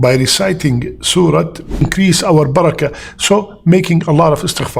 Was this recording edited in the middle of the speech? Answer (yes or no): yes